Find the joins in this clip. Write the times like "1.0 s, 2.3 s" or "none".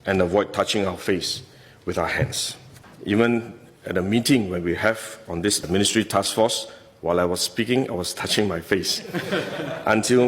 2.9 s